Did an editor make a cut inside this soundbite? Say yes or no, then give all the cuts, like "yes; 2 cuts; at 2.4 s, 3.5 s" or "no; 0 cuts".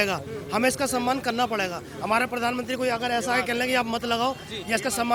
no; 0 cuts